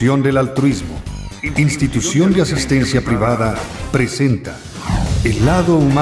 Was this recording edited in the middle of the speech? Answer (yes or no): no